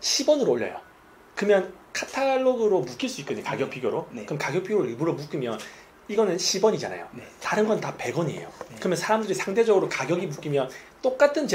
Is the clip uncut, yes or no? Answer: yes